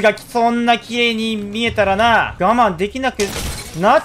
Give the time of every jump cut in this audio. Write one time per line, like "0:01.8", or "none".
0:02.3